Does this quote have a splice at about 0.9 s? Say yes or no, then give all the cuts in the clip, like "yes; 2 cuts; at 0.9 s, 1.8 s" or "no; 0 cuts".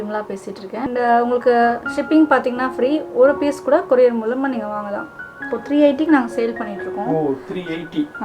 yes; 2 cuts; at 0.9 s, 5.5 s